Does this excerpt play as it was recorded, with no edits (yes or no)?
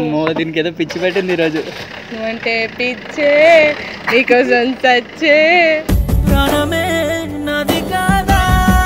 yes